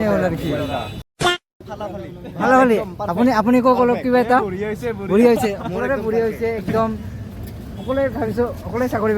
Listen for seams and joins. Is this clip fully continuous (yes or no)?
no